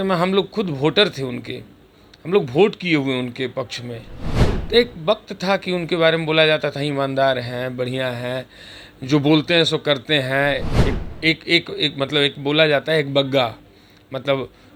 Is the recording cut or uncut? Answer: uncut